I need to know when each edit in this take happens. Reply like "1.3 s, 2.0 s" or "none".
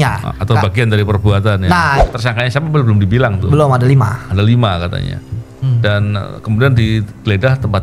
2.0 s

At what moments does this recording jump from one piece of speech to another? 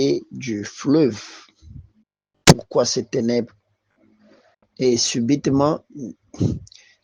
none

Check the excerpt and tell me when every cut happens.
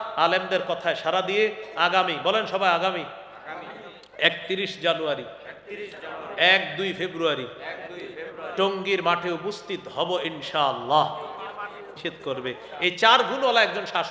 12.0 s

